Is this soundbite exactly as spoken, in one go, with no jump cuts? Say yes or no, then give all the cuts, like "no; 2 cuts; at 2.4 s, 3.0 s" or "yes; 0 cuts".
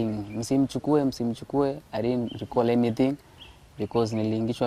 yes; 0 cuts